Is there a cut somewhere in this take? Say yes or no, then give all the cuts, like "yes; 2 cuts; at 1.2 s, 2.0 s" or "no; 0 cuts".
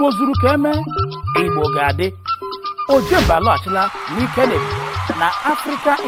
no; 0 cuts